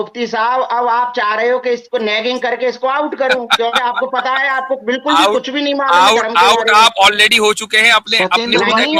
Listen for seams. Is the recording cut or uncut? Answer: uncut